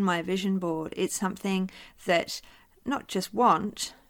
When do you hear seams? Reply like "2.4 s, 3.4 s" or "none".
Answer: none